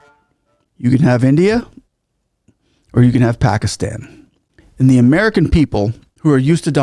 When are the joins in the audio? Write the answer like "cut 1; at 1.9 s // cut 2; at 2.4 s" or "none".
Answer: none